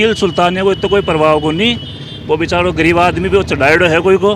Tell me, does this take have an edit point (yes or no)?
no